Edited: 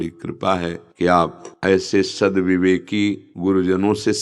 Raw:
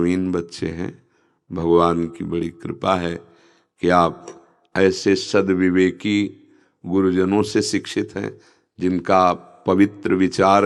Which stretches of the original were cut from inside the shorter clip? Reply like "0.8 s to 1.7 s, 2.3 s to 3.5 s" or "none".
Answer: 3.2 s to 3.7 s, 4.3 s to 4.6 s, 6.4 s to 6.8 s